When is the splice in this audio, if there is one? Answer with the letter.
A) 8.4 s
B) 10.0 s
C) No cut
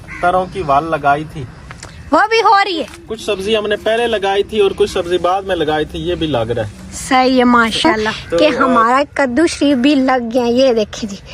A